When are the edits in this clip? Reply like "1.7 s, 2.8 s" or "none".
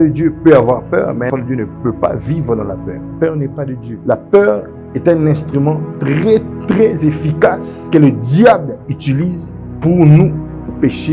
1.3 s, 3.0 s, 3.9 s